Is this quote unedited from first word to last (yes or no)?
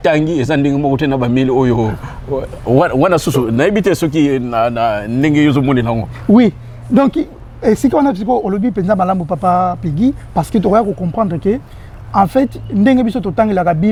yes